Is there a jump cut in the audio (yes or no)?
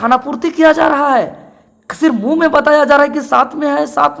no